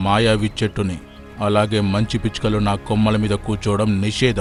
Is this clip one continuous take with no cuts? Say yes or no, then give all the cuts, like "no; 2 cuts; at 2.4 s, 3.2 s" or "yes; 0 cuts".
yes; 0 cuts